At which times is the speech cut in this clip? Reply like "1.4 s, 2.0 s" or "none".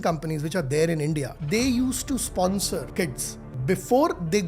1.3 s, 3.3 s